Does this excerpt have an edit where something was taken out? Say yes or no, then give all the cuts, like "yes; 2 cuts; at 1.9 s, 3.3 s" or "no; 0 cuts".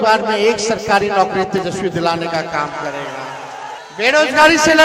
yes; 1 cut; at 3.8 s